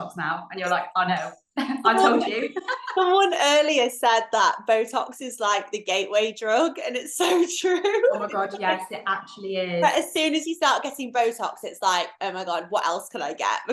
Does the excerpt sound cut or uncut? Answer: uncut